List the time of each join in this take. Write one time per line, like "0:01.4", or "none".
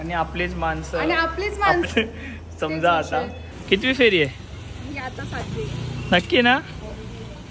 0:01.9
0:03.5

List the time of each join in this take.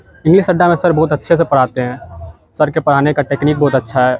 none

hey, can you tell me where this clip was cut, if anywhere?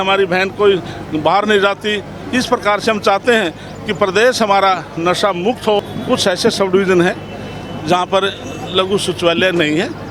0:05.9

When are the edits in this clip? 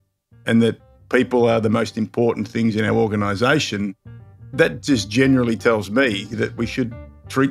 0:04.5
0:06.3

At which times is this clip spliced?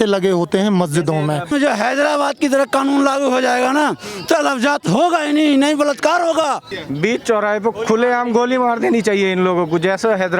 0:01.5
0:06.8

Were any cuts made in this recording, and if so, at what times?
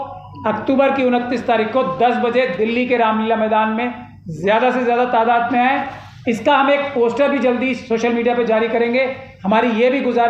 none

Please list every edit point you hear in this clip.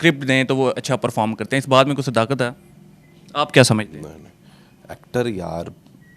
none

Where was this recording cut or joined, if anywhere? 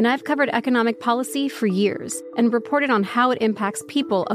0:02.1

